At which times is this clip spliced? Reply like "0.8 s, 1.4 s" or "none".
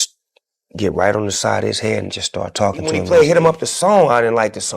2.9 s

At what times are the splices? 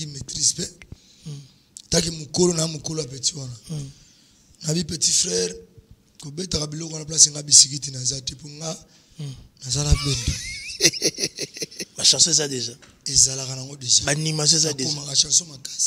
11.9 s

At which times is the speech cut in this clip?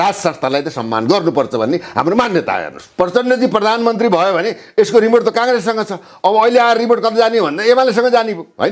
2.8 s

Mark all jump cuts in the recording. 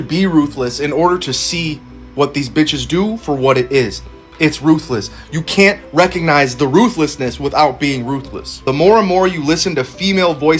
5.8 s, 9.6 s

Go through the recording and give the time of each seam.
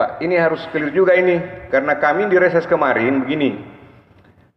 none

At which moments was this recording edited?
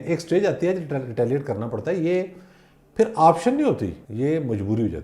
4.0 s

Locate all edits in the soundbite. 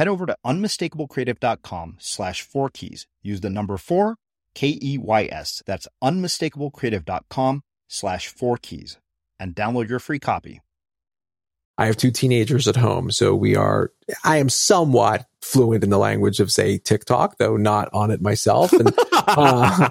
11.7 s

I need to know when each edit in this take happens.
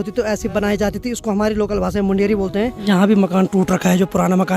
2.8 s

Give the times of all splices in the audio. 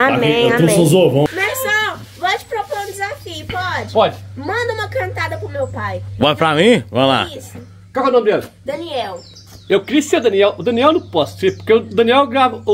1.3 s

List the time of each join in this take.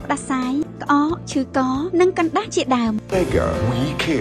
3.0 s

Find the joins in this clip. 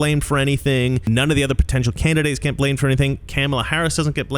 1.0 s

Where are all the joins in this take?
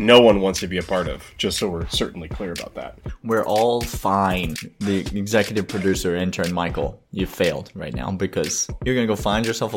2.8 s, 4.6 s, 8.7 s

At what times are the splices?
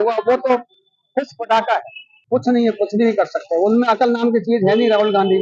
2.1 s

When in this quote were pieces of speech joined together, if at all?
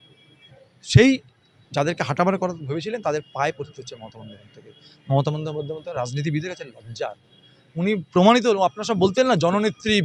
none

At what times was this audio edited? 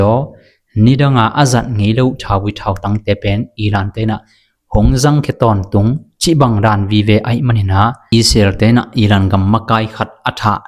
8.0 s

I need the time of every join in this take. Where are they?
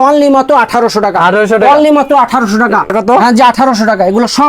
2.9 s

